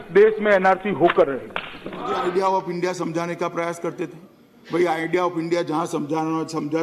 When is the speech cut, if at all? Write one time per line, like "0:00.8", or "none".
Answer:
0:02.2